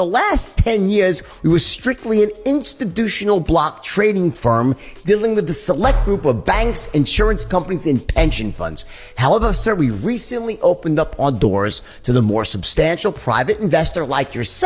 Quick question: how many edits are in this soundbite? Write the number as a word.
one